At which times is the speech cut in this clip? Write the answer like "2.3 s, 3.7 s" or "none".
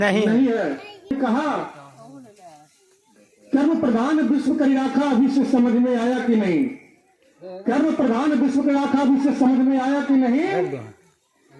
1.1 s